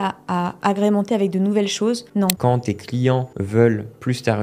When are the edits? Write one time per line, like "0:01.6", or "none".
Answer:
0:02.2
0:03.4

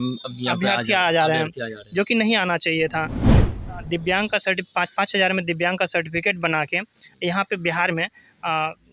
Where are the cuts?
0:03.3

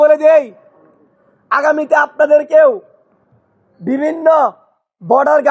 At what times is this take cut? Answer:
none

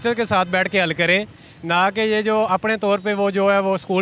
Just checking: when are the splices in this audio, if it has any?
0:02.5

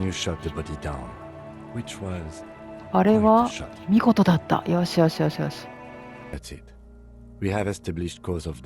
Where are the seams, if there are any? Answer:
0:06.3

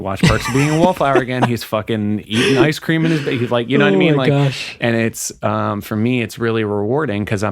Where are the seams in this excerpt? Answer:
none

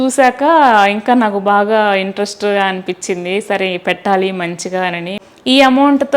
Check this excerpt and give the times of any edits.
0:05.2

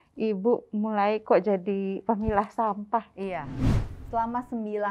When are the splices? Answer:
0:03.5

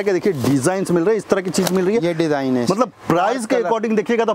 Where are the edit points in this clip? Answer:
none

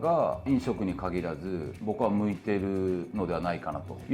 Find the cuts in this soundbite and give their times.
none

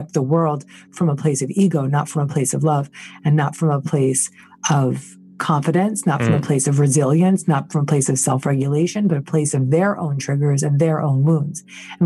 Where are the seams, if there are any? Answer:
none

